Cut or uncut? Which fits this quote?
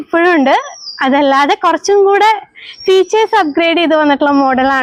uncut